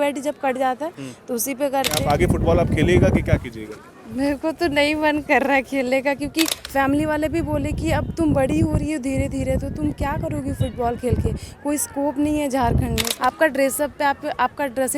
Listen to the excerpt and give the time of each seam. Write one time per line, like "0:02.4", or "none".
0:02.0
0:06.6
0:13.1